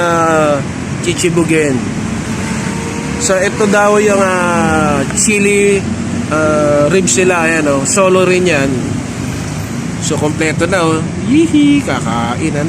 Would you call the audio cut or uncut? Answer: uncut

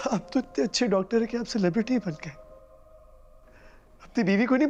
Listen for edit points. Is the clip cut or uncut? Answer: uncut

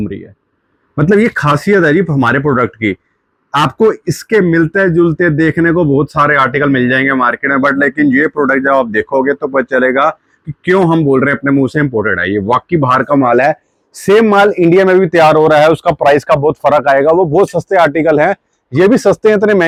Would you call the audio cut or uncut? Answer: uncut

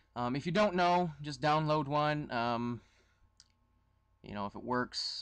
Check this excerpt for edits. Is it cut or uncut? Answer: uncut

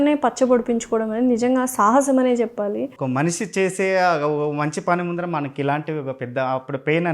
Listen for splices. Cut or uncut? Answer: cut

